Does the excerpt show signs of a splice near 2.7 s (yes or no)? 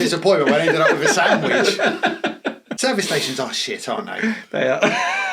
yes